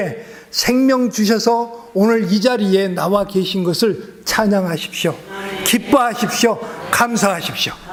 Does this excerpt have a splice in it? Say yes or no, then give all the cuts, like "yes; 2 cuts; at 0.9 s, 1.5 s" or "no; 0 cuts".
no; 0 cuts